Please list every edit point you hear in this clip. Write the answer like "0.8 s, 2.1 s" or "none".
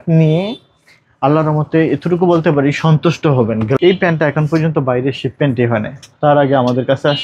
3.8 s